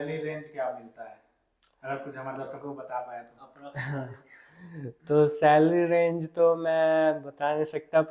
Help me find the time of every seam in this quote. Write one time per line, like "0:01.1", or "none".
none